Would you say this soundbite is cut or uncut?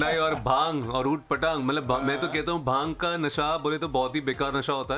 uncut